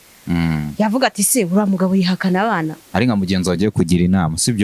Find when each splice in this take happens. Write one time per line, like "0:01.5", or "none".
0:02.8